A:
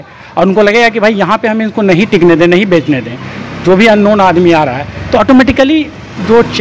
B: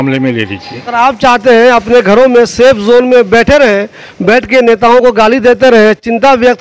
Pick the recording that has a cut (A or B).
B